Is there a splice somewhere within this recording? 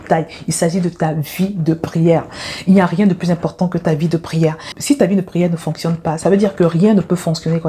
no; 0 cuts

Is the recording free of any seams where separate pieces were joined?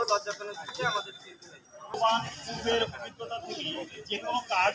no; 1 cut; at 2.0 s

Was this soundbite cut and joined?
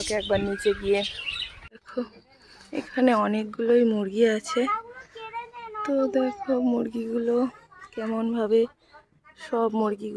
yes; 1 cut; at 1.8 s

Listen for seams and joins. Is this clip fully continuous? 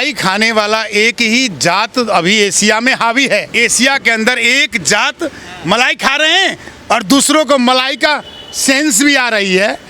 no; 1 cut; at 3.5 s

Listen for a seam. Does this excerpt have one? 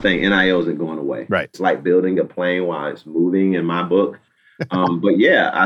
yes; 1 cut; at 1.5 s

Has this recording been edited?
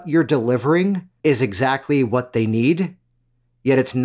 yes; 1 cut; at 1.1 s

